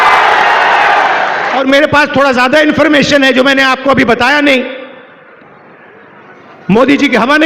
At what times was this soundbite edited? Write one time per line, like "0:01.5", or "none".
0:01.6

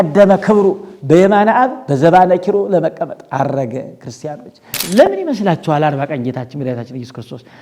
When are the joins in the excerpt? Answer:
0:04.8

